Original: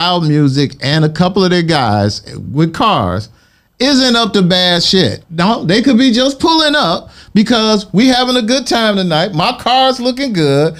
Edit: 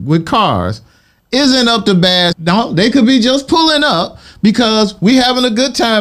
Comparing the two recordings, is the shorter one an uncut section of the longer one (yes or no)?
no